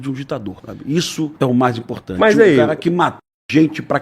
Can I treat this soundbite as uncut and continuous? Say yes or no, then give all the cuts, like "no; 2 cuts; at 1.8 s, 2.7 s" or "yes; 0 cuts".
no; 1 cut; at 0.9 s